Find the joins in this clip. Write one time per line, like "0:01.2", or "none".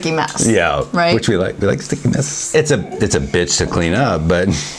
0:02.5